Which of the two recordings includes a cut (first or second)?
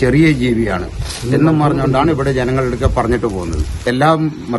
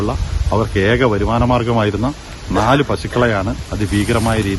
first